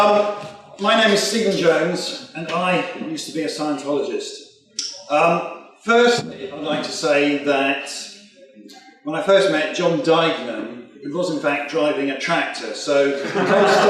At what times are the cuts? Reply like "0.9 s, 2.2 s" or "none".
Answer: 5.1 s